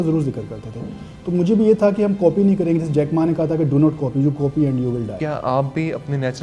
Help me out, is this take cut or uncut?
cut